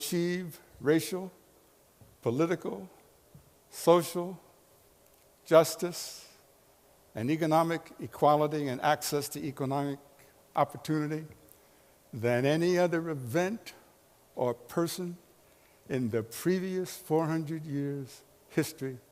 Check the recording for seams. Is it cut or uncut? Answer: cut